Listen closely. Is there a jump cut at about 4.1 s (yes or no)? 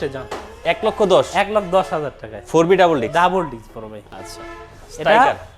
no